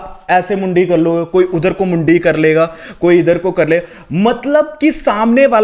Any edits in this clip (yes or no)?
no